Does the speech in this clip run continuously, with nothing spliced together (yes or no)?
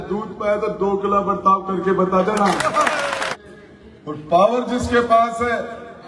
no